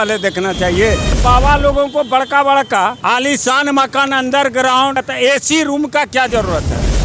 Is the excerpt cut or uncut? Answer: cut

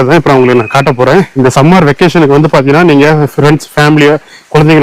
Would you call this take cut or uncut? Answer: cut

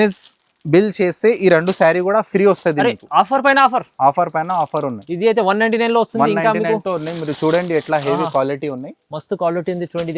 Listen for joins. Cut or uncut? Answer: uncut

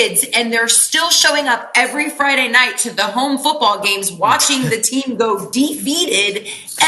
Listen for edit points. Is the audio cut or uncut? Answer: uncut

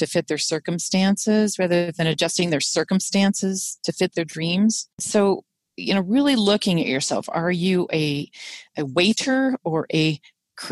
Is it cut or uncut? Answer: cut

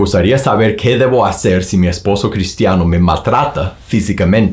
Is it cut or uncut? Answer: uncut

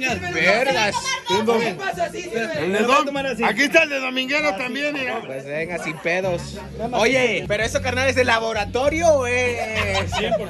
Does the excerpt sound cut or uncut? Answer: uncut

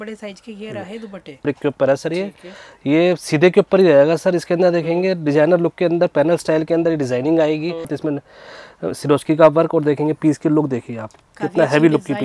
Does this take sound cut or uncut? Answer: cut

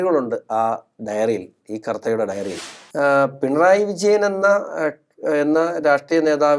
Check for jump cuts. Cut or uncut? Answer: cut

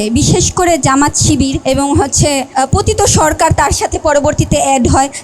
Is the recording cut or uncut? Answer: cut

